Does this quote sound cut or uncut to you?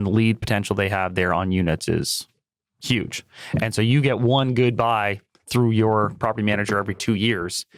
uncut